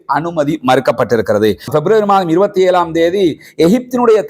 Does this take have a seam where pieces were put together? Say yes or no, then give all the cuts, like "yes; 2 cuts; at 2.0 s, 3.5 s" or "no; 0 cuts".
yes; 1 cut; at 1.7 s